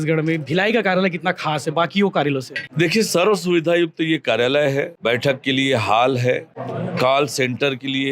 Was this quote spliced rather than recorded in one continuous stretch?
yes; 3 cuts; at 2.6 s, 4.9 s, 6.6 s

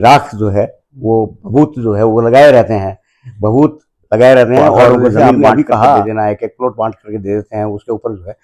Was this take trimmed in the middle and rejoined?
yes; 1 cut; at 6.1 s

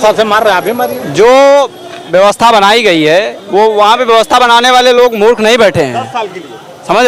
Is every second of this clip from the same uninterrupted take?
yes; 0 cuts

